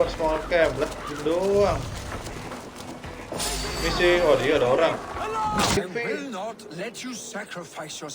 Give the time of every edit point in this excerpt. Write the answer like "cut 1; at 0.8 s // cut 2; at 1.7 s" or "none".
cut 1; at 5.8 s